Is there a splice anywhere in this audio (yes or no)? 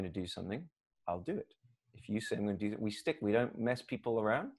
no